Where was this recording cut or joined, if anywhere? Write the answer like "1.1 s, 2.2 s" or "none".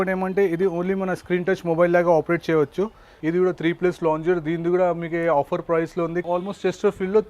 3.1 s, 6.2 s